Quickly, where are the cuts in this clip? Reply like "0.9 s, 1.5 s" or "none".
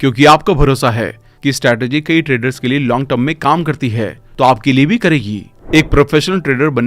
5.5 s

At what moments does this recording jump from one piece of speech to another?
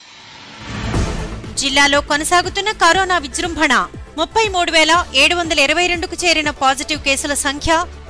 none

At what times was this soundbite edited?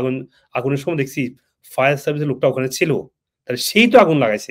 none

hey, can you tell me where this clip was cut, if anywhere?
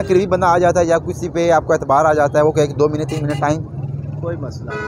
none

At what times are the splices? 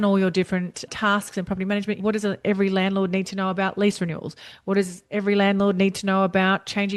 2.0 s

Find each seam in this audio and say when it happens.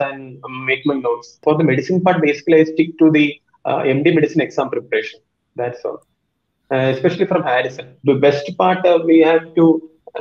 1.3 s, 7.9 s

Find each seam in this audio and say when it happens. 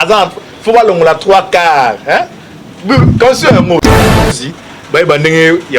4.0 s

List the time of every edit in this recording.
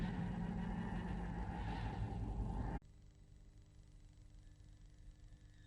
none

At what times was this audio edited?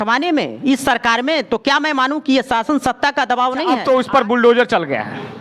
3.8 s

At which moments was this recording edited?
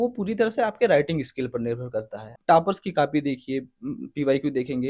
2.4 s

